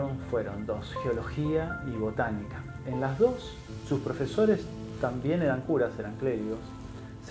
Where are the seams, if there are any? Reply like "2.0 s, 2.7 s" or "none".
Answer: 1.3 s